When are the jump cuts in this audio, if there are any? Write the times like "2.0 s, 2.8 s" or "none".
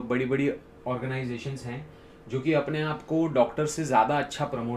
none